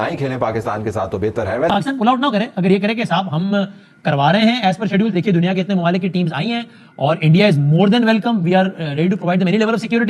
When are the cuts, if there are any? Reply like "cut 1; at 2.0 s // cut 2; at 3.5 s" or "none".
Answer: cut 1; at 1.7 s